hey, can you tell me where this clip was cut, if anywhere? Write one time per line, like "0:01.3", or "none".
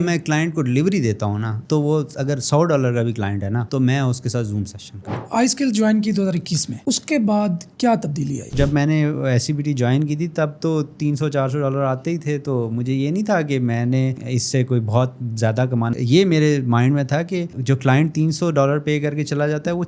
0:05.2
0:08.5
0:15.9